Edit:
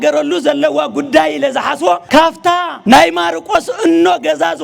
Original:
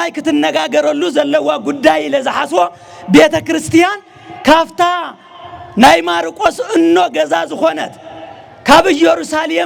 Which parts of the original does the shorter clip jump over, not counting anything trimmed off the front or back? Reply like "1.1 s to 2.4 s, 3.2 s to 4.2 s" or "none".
2.9 s to 5.1 s